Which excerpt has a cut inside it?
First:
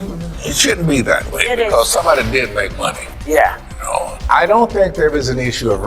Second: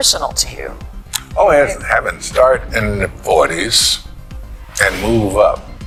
first; 1 cut; at 4.2 s

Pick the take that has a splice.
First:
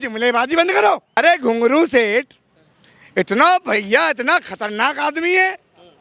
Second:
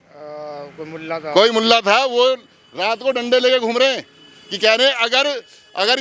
first; 1 cut; at 1.1 s

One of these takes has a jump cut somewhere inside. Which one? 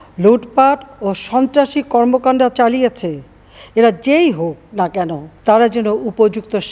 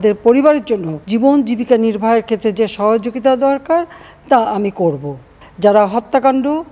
second; 2 cuts; at 0.9 s, 5.3 s

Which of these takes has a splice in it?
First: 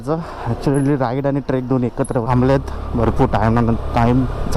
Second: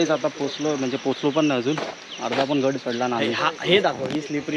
first; 1 cut; at 2.2 s

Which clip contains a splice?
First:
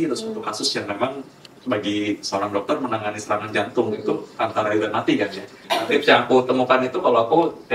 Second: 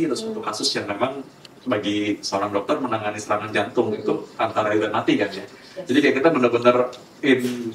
first; 1 cut; at 5.8 s

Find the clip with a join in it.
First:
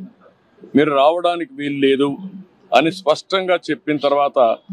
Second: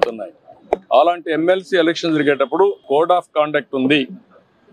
second; 1 cut; at 2.8 s

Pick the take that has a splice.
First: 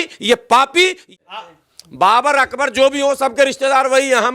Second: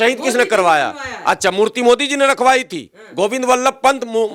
first; 1 cut; at 1.1 s

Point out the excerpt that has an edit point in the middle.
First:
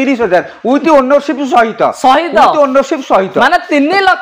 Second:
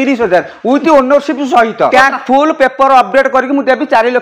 second; 1 cut; at 1.9 s

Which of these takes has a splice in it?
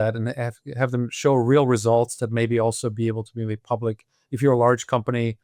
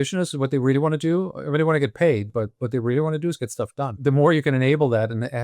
second; 1 cut; at 4.0 s

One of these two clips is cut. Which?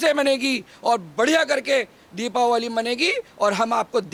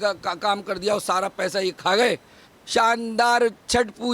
second; 1 cut; at 2.4 s

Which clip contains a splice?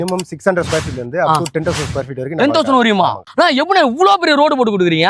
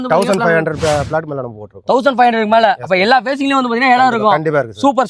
first; 1 cut; at 3.3 s

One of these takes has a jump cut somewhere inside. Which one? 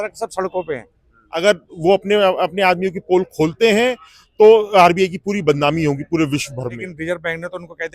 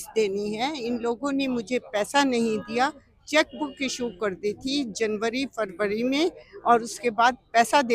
first; 2 cuts; at 1.2 s, 6.9 s

